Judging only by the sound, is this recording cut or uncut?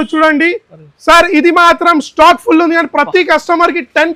uncut